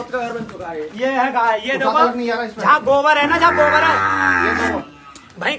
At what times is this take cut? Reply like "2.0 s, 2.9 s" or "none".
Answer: none